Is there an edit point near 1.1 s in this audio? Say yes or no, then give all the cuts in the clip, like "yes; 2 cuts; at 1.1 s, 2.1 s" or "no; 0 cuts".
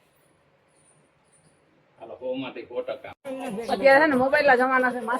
no; 1 cut; at 3.1 s